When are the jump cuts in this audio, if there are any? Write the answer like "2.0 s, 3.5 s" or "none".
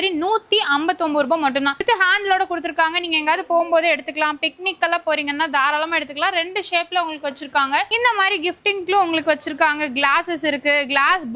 1.8 s, 7.9 s